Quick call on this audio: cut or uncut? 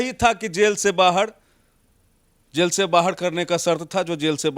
uncut